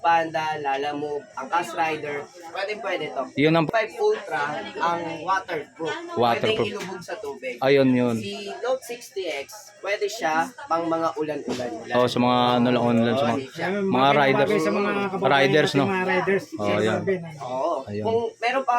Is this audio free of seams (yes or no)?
no